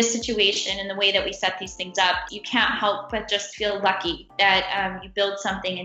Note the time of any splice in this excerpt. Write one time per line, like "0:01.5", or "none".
0:02.2